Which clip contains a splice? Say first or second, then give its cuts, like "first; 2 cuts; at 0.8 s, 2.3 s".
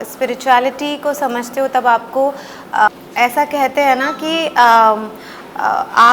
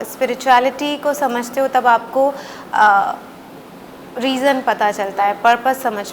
first; 1 cut; at 2.9 s